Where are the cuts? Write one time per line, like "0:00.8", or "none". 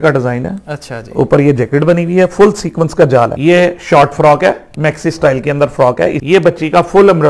0:03.4
0:06.2